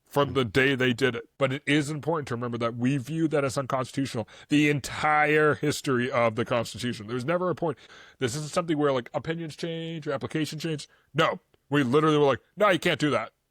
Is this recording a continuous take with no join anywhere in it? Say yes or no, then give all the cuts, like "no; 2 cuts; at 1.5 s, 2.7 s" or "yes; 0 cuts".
no; 2 cuts; at 1.2 s, 7.9 s